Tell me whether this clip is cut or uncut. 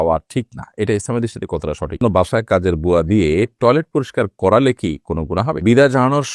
cut